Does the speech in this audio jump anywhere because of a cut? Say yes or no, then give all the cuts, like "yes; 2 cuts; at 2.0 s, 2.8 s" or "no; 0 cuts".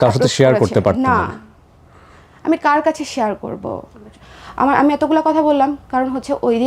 yes; 1 cut; at 4.2 s